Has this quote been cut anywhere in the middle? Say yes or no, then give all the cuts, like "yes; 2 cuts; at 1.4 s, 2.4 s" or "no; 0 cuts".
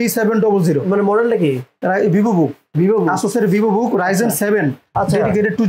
no; 0 cuts